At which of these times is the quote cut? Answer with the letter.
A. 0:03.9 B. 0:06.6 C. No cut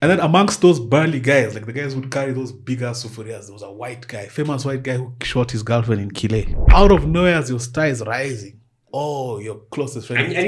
B